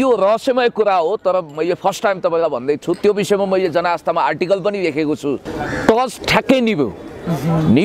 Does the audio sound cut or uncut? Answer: cut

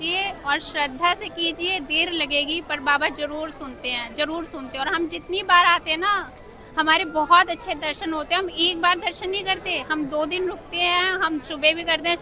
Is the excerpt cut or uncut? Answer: uncut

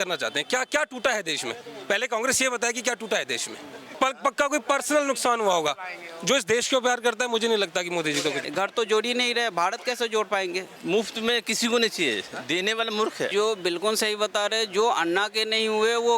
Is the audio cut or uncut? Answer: cut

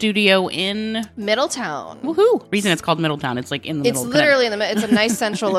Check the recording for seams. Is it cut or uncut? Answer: uncut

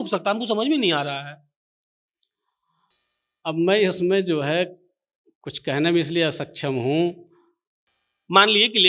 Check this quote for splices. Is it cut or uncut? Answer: uncut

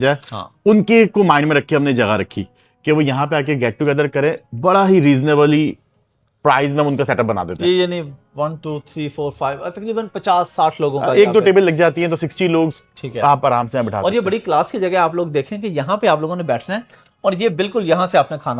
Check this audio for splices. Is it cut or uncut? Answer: uncut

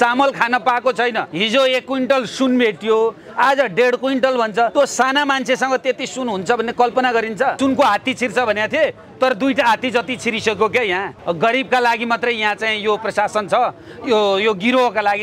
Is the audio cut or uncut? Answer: cut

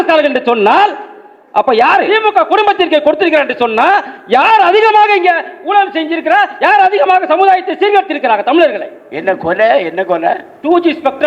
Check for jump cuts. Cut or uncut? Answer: cut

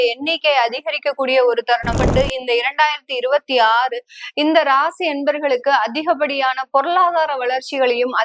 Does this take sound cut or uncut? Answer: cut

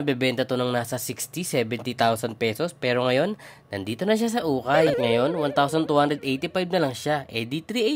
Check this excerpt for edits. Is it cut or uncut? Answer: uncut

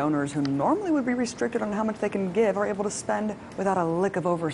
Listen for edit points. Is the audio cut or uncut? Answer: cut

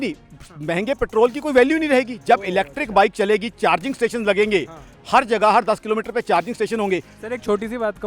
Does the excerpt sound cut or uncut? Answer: cut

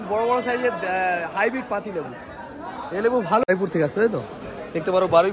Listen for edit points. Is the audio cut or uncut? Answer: cut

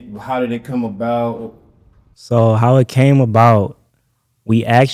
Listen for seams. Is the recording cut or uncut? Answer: uncut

